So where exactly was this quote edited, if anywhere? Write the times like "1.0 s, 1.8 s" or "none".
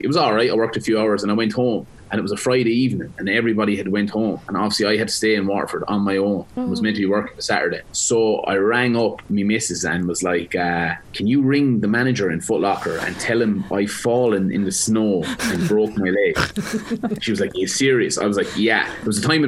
4.4 s, 6.5 s, 7.9 s, 11.0 s, 17.2 s